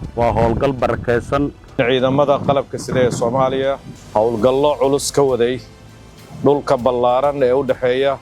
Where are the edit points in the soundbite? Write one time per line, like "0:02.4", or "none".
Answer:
0:01.8
0:03.9